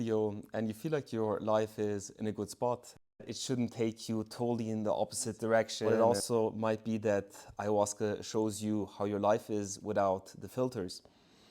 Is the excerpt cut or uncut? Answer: cut